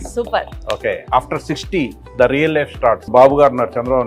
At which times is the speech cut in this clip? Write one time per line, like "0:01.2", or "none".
0:01.0
0:03.1